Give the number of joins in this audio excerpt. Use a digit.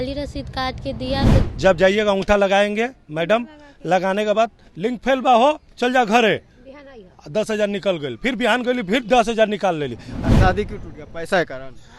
2